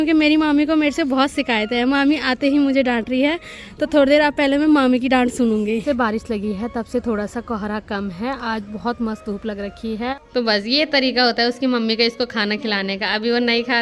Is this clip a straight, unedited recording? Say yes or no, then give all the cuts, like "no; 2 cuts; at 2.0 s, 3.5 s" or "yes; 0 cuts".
no; 2 cuts; at 5.8 s, 10.1 s